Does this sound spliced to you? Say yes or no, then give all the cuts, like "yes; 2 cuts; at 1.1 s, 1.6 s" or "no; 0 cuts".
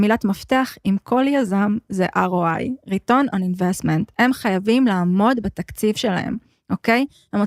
no; 0 cuts